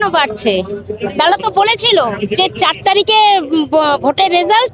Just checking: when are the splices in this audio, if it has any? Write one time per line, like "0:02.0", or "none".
0:00.9